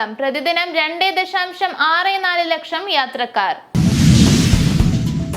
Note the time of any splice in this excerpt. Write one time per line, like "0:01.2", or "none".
0:03.7